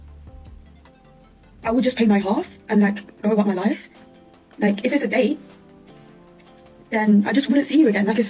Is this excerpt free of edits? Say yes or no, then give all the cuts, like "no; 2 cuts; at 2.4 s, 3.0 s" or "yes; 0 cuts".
yes; 0 cuts